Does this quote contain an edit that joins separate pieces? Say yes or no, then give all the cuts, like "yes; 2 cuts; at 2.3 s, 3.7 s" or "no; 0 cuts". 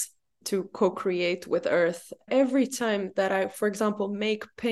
yes; 1 cut; at 2.3 s